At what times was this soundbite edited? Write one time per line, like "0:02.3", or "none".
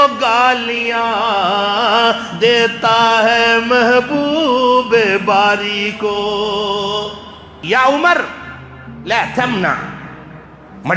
0:07.5

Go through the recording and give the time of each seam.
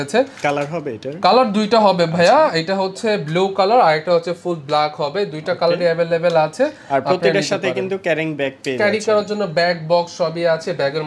none

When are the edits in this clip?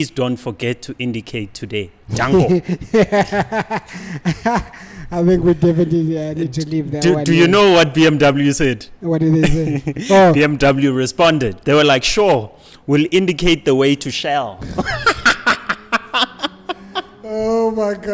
none

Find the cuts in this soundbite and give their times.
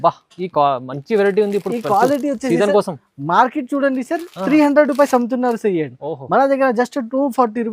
none

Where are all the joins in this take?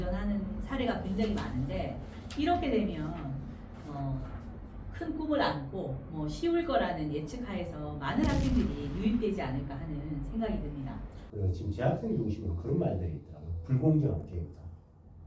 0:11.2

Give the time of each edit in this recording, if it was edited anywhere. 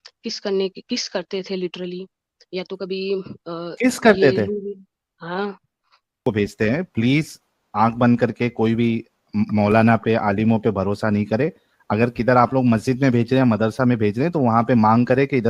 0:06.2

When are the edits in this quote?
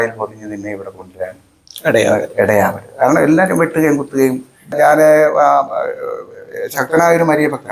0:04.8

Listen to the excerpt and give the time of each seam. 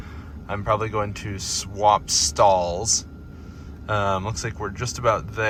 none

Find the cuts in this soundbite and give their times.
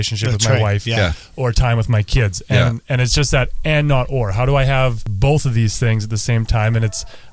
0:05.1

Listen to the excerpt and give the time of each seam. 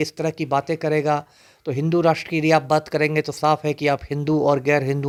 none

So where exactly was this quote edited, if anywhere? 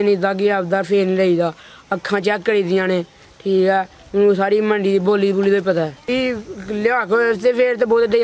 0:06.1

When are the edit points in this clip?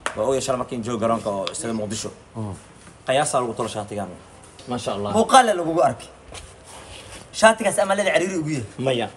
0:04.6

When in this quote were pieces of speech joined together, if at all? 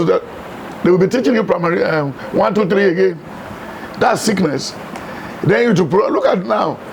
none

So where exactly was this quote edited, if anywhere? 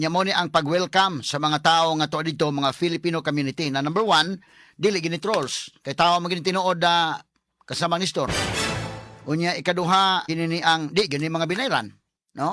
0:10.2

